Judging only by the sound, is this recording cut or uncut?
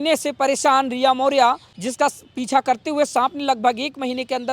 cut